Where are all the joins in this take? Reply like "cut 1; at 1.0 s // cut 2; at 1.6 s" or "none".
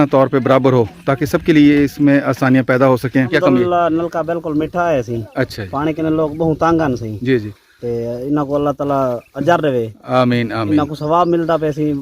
cut 1; at 3.3 s